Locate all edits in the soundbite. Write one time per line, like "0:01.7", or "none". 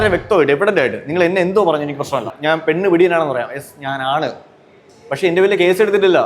0:02.3